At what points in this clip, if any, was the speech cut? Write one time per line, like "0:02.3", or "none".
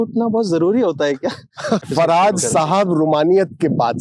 0:01.8